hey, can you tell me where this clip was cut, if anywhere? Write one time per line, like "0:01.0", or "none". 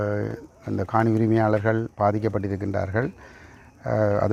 none

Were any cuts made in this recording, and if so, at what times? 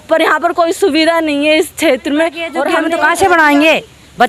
0:02.7

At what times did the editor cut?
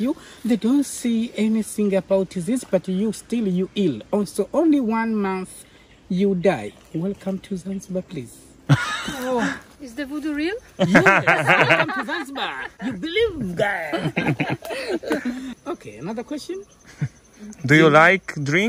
0:09.6
0:15.5

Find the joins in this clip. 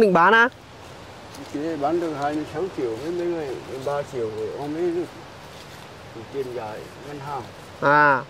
none

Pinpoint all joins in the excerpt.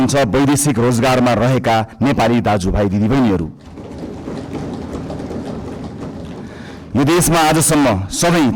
none

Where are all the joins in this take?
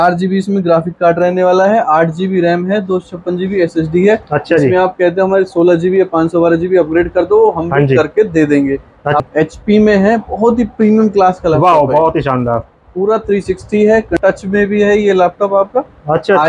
0:09.2
0:14.1

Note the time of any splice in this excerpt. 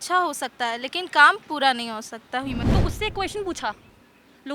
0:02.6

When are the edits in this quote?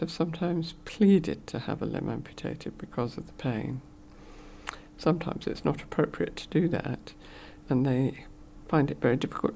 none

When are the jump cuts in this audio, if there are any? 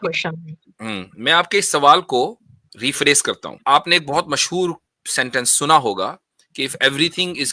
0:03.6

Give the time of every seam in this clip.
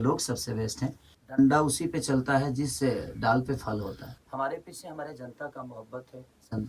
0:01.1
0:04.1

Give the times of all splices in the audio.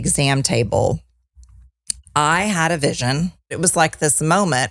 0:03.5

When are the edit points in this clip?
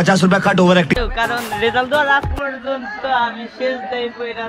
0:01.1

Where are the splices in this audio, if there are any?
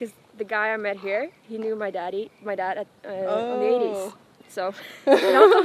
none

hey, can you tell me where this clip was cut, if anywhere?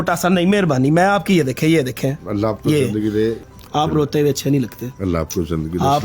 0:03.4

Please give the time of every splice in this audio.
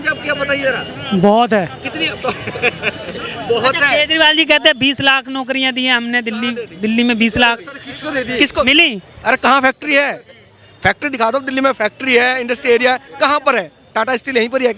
none

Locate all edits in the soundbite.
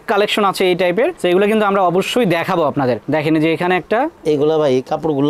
none

